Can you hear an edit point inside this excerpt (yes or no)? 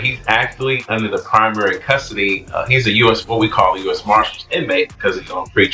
no